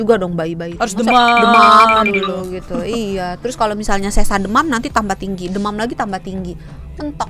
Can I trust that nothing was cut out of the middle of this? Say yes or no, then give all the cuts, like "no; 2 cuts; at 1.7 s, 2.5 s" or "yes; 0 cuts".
yes; 0 cuts